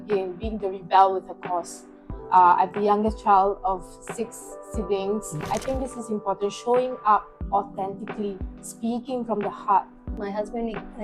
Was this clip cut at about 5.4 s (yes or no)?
yes